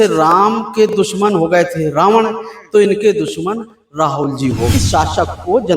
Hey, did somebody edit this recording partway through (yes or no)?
yes